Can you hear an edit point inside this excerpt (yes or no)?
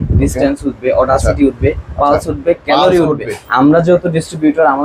yes